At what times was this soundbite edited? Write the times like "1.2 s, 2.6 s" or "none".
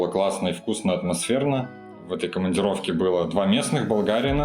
1.8 s